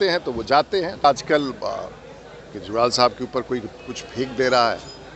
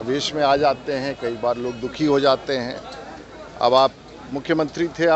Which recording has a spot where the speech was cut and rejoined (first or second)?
first